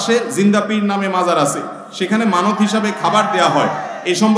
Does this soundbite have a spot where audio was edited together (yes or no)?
no